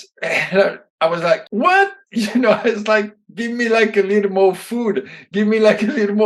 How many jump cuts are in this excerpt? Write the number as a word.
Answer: one